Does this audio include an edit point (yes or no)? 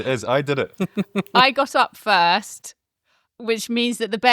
yes